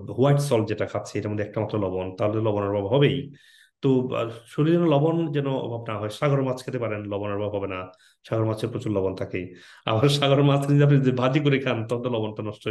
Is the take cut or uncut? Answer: uncut